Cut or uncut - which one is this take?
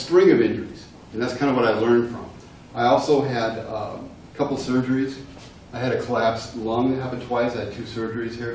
uncut